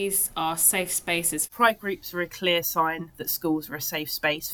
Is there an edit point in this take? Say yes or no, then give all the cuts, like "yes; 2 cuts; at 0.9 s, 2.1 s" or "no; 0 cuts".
yes; 1 cut; at 1.5 s